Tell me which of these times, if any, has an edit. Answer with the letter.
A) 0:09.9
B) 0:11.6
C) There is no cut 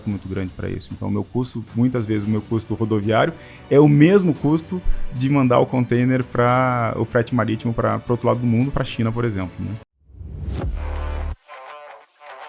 A